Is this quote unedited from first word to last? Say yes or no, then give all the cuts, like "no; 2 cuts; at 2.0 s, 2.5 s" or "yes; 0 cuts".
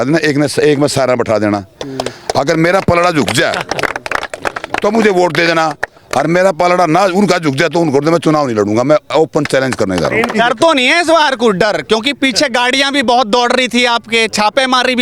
no; 1 cut; at 10.4 s